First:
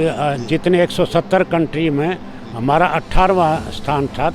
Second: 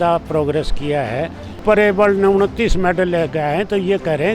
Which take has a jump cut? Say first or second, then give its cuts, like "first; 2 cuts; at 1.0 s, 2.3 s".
second; 1 cut; at 1.6 s